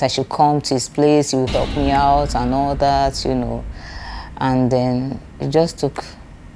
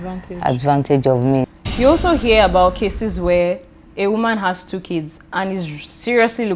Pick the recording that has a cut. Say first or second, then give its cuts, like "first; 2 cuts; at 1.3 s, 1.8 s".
second; 1 cut; at 1.5 s